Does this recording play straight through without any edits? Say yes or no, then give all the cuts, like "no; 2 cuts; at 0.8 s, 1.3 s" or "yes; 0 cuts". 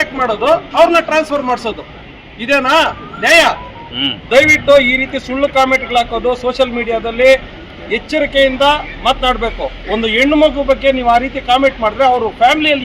no; 1 cut; at 4.1 s